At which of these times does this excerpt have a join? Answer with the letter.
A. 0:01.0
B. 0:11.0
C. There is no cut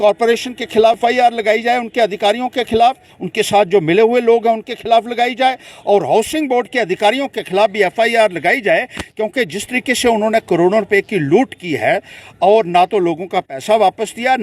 A